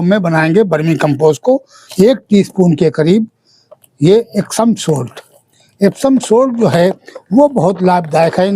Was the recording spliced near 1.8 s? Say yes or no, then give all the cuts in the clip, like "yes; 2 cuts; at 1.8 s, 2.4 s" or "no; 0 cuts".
yes; 1 cut; at 1.8 s